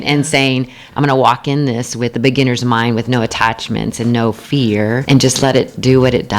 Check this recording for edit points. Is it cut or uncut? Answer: cut